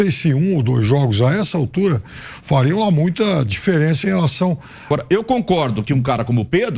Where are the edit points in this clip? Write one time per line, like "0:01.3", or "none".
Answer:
0:04.9